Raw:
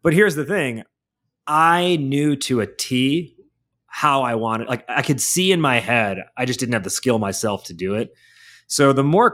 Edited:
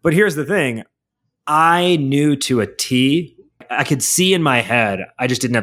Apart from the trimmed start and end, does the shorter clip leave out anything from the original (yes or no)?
yes